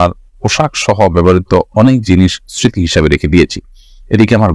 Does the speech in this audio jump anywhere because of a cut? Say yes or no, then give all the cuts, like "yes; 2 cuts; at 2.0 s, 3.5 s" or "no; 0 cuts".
no; 0 cuts